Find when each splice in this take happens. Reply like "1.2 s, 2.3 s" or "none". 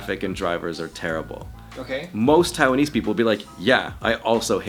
none